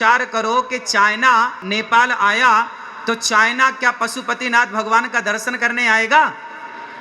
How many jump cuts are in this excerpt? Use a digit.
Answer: 1